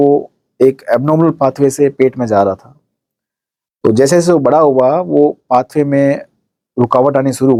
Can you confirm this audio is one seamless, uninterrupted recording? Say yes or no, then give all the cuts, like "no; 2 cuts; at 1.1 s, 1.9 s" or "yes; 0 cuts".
yes; 0 cuts